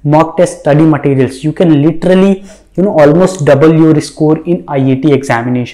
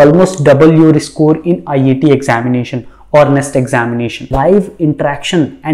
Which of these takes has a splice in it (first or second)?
second